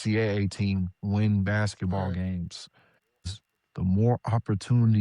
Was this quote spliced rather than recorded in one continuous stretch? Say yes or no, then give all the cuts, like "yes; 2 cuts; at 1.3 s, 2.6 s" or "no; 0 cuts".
yes; 1 cut; at 3.3 s